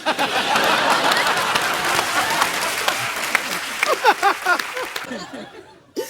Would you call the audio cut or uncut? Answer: cut